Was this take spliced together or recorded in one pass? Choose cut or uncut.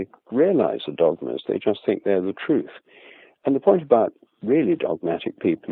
uncut